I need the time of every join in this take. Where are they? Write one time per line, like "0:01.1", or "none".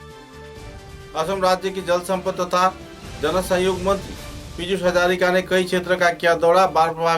0:01.1